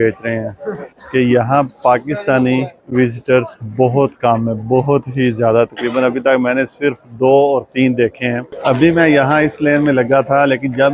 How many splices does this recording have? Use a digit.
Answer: 2